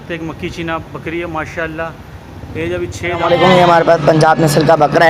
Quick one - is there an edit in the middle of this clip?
yes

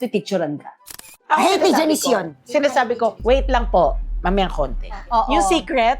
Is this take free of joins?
no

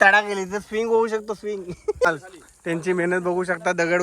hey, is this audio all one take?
no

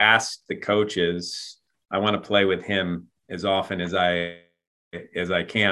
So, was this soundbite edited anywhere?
no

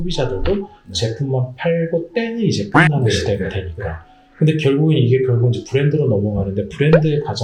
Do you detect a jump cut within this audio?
no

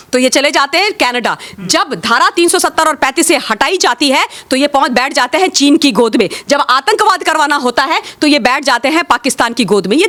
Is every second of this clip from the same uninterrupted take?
yes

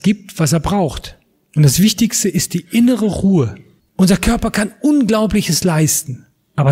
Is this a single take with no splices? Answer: no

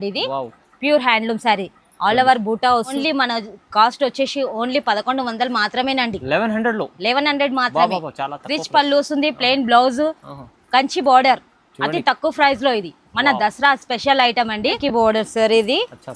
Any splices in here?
yes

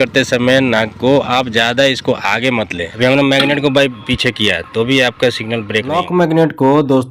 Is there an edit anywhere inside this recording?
yes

